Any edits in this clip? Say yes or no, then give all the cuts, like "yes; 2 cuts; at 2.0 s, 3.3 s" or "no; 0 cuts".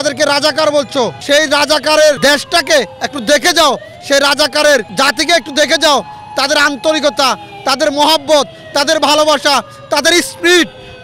yes; 3 cuts; at 1.2 s, 2.2 s, 4.9 s